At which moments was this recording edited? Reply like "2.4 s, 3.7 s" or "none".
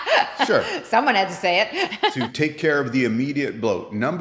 2.0 s